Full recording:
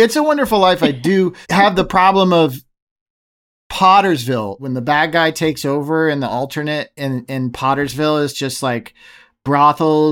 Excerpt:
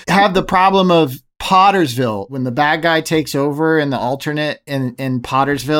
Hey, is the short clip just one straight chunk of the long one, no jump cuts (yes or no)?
no